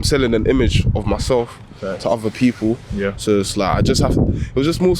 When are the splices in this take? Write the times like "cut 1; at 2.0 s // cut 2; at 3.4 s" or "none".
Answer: none